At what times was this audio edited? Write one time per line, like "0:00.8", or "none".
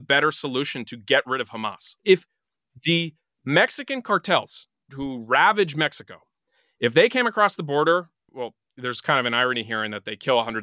0:01.8
0:04.9
0:08.2